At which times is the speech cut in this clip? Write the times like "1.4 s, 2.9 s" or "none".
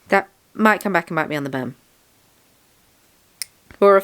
none